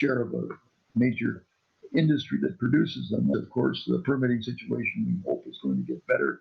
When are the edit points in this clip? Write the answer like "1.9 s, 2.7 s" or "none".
3.3 s